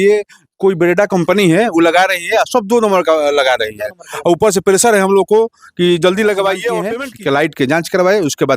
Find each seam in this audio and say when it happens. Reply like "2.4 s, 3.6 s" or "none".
6.9 s